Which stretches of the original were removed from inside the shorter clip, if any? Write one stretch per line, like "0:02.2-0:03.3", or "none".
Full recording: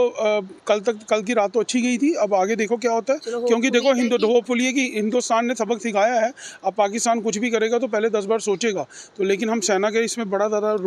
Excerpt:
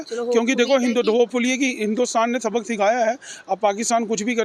none